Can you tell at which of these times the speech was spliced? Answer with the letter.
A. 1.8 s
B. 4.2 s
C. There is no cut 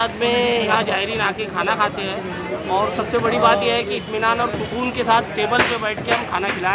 C